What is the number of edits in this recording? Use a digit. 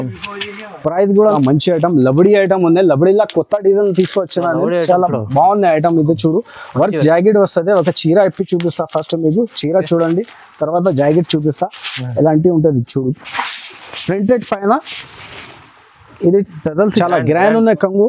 2